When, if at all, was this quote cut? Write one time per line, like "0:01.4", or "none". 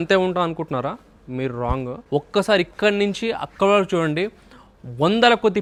none